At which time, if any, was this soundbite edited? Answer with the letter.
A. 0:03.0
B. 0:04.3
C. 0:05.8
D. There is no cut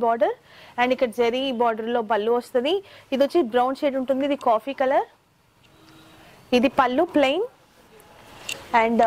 D